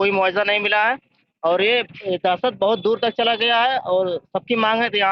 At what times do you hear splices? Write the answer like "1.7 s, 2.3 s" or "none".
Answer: none